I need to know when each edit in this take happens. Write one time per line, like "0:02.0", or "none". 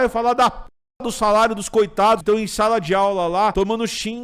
0:02.2
0:03.5